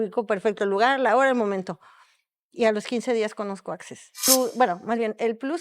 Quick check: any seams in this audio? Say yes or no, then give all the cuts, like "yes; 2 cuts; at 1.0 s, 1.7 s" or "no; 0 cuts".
yes; 1 cut; at 4.3 s